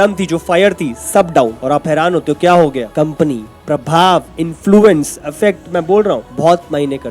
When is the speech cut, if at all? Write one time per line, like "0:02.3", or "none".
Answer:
none